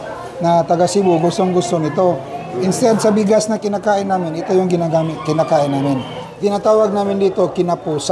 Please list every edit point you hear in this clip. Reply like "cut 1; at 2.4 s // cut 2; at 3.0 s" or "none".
cut 1; at 6.2 s